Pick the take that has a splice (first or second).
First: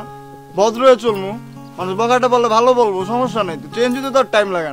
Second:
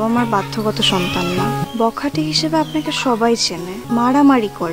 second